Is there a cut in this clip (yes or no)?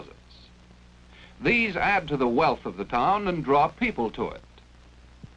yes